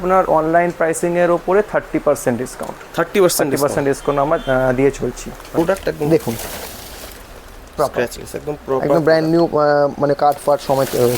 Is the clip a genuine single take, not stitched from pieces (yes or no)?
no